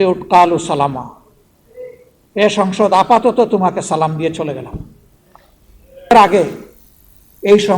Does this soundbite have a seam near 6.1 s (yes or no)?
yes